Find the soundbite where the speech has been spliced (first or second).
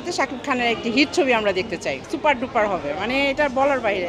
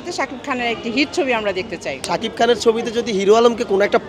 second